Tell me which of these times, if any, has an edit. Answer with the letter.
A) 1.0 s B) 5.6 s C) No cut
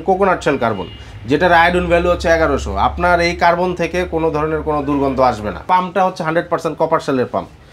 B